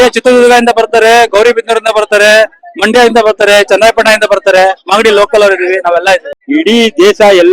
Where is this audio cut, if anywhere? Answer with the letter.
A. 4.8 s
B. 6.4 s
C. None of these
B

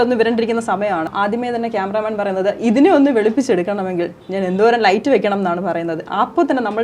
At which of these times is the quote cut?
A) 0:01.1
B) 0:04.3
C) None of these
A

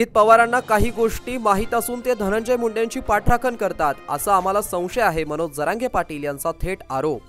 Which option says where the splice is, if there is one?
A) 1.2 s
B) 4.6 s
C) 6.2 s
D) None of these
D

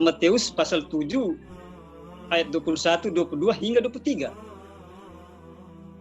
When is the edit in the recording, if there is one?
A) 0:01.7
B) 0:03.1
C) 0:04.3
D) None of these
C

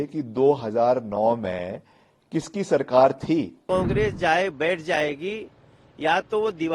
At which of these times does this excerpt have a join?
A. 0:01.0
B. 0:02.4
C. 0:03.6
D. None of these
C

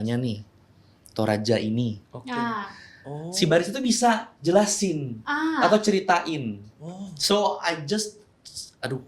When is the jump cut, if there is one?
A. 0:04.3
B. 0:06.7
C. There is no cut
C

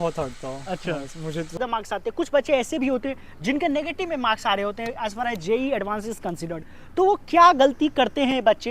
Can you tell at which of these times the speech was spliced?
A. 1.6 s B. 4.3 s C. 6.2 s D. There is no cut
A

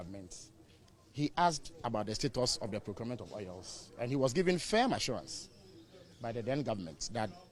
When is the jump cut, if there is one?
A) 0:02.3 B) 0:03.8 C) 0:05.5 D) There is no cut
D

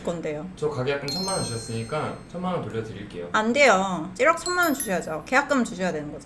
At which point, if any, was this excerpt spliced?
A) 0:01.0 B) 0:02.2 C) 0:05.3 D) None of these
D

